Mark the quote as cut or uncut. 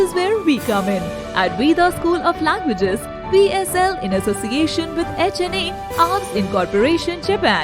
uncut